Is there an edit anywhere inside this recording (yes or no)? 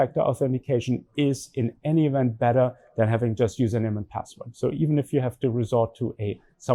no